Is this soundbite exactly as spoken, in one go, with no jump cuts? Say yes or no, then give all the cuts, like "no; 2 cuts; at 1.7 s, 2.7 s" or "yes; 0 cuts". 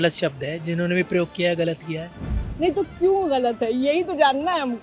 yes; 0 cuts